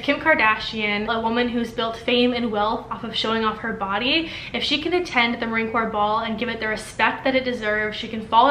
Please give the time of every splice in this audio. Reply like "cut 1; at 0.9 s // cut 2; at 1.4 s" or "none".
cut 1; at 1.1 s